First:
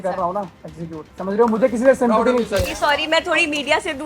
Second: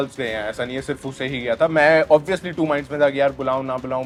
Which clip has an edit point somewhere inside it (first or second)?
first